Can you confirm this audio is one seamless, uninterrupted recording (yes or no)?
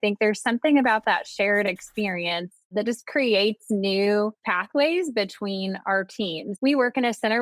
no